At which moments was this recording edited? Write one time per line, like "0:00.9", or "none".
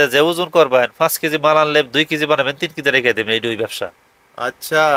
none